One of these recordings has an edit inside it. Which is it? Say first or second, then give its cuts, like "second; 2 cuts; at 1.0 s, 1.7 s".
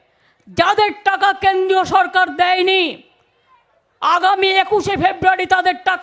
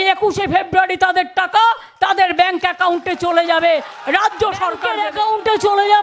second; 1 cut; at 5.0 s